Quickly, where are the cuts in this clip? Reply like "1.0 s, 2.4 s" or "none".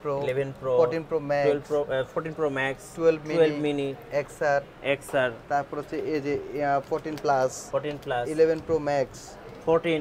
none